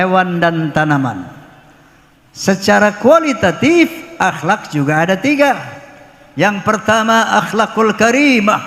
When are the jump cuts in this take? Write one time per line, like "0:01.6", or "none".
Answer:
none